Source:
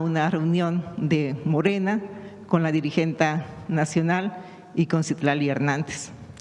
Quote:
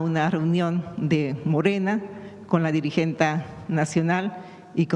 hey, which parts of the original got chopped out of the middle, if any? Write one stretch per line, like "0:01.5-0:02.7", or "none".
none